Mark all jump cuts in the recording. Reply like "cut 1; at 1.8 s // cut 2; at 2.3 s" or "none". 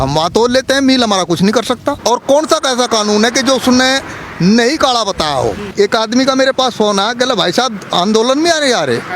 cut 1; at 2.0 s // cut 2; at 5.6 s